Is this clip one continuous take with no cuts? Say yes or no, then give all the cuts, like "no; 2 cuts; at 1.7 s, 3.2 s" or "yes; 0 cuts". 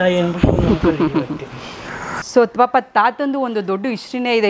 no; 1 cut; at 2.1 s